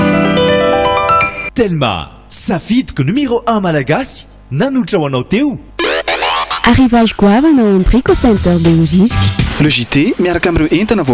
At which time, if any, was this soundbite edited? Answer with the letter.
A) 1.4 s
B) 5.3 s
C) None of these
C